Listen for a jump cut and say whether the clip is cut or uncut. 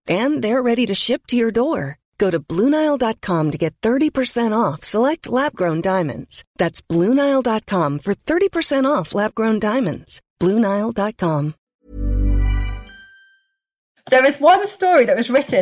cut